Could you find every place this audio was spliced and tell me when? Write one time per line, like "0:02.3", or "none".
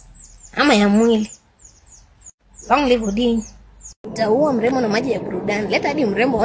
0:04.0